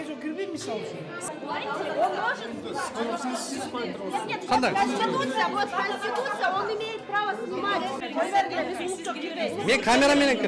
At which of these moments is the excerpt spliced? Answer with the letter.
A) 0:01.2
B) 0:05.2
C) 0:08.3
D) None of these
A